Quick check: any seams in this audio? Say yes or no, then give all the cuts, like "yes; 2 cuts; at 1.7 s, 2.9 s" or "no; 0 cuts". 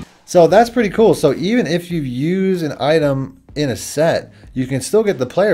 no; 0 cuts